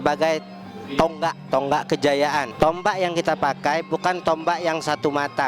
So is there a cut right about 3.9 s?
no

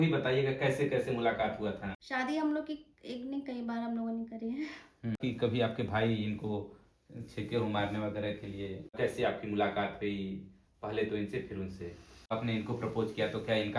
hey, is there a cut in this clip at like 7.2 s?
no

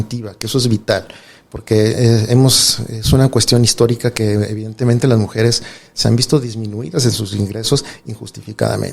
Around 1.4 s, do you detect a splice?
no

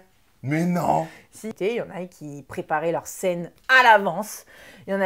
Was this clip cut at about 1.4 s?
yes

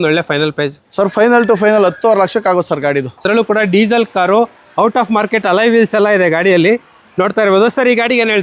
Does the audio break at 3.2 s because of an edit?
yes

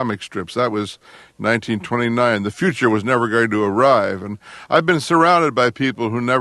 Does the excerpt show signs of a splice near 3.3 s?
yes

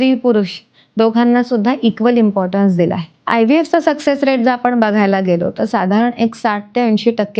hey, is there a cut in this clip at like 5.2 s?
no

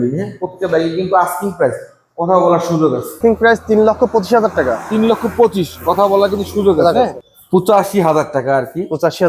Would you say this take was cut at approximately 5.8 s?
no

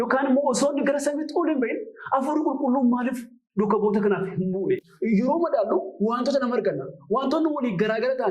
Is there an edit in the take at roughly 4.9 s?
yes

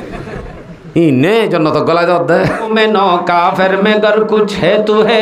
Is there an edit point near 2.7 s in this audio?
yes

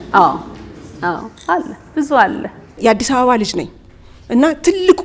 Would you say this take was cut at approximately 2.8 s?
yes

